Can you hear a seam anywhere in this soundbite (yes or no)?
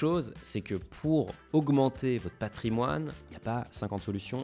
yes